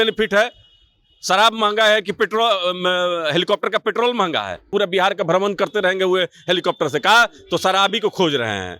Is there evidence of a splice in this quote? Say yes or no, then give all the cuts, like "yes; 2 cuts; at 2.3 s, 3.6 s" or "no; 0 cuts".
yes; 1 cut; at 4.7 s